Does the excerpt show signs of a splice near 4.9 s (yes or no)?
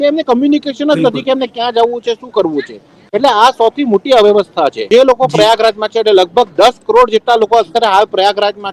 yes